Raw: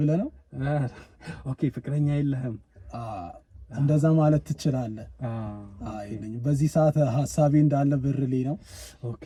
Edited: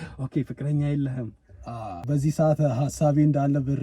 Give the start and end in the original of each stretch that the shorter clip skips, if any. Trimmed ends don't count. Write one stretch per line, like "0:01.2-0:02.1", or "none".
0:03.3-0:06.4